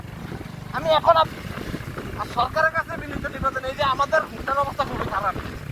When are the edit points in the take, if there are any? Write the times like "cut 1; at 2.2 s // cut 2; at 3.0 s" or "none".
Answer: cut 1; at 1.2 s